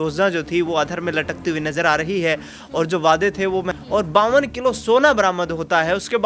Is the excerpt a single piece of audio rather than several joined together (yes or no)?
no